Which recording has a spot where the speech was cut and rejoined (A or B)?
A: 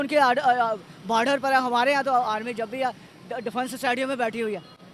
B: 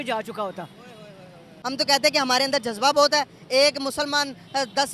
B